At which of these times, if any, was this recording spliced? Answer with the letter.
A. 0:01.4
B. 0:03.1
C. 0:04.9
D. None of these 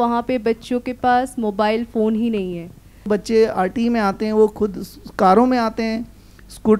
B